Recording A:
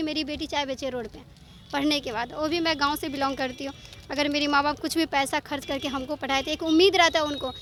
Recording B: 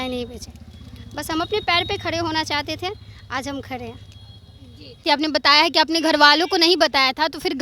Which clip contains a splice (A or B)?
B